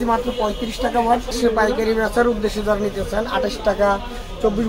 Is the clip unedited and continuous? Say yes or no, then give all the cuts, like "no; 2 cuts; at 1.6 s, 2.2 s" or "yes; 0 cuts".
no; 1 cut; at 1.4 s